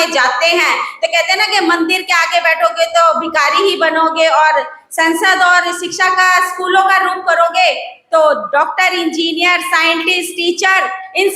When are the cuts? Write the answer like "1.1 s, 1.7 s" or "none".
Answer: none